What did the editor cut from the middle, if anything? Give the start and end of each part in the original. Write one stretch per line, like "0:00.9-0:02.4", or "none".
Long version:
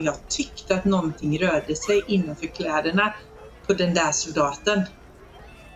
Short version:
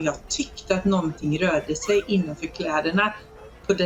none